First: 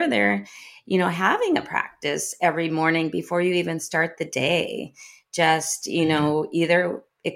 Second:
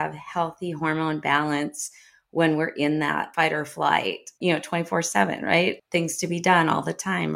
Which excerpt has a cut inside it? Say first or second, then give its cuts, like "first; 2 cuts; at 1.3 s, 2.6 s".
second; 3 cuts; at 3.3 s, 4.3 s, 5.8 s